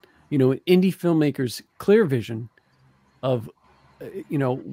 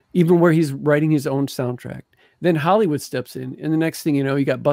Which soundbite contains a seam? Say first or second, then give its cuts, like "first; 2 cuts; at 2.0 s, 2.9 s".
first; 1 cut; at 3.5 s